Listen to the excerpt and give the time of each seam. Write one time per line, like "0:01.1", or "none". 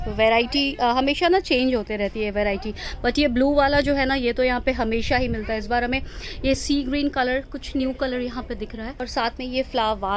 none